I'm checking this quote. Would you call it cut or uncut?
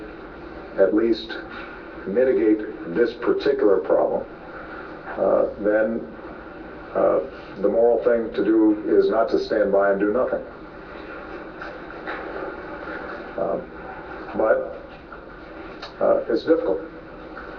cut